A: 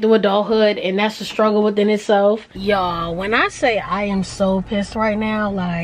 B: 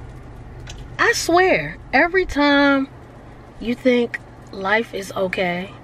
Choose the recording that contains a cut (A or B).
A